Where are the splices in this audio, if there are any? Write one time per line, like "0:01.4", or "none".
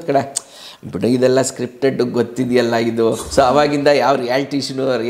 0:03.2